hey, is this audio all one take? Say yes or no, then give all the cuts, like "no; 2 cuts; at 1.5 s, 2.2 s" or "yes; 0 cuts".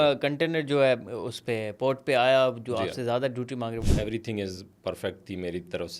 no; 1 cut; at 3.8 s